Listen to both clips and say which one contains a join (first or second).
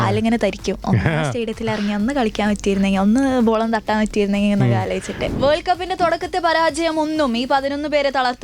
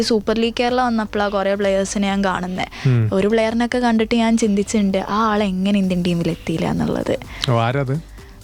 first